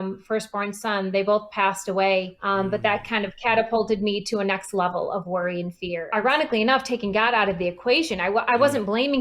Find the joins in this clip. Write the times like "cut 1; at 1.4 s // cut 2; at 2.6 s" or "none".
cut 1; at 2.4 s // cut 2; at 5.9 s